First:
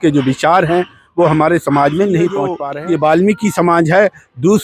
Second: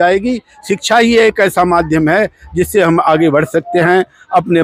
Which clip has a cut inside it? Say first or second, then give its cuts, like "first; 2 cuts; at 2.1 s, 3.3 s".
first; 1 cut; at 2.6 s